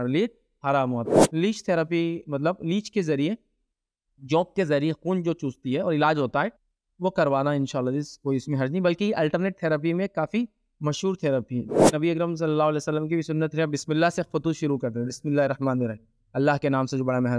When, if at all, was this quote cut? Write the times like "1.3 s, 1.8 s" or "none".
1.1 s, 12.0 s